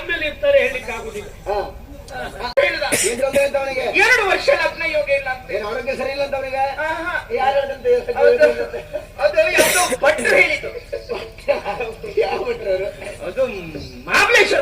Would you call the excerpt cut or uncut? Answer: cut